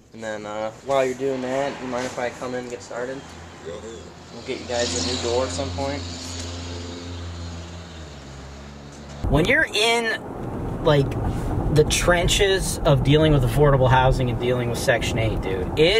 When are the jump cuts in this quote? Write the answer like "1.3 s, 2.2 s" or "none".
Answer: none